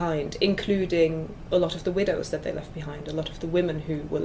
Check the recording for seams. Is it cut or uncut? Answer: uncut